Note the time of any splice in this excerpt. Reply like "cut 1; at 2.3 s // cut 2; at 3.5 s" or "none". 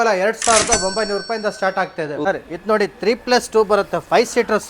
cut 1; at 2.2 s